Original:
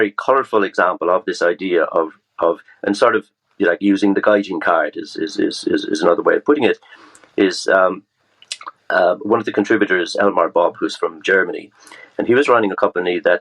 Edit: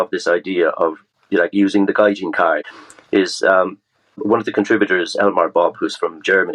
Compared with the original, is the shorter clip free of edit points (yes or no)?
no